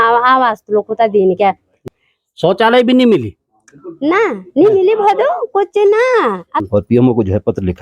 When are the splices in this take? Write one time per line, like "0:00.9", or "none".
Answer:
0:01.8
0:06.7